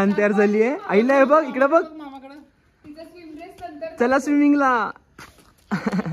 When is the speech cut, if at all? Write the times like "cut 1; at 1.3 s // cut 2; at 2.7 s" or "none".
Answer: none